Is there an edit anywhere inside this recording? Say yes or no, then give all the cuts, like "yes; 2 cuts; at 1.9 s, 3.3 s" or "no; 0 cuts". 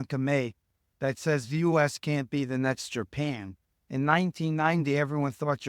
no; 0 cuts